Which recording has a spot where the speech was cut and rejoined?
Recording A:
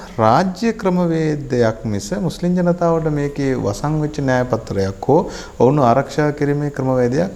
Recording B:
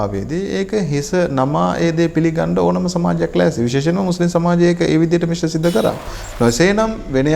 B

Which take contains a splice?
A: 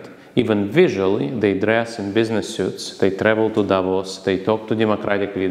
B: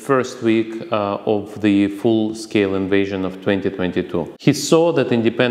B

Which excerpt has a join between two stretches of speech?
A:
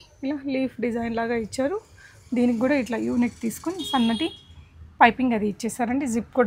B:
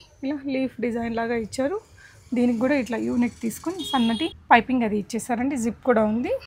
B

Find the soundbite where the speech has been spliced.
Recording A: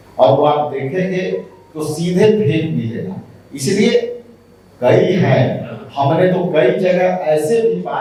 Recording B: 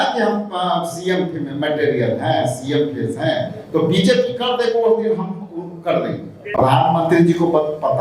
B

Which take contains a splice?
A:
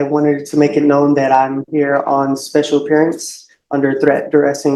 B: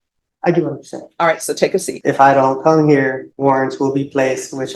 B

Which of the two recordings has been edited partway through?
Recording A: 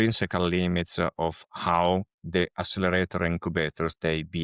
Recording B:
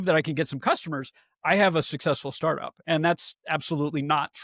A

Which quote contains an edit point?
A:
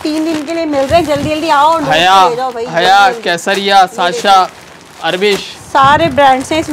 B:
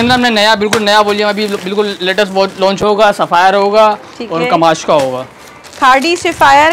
B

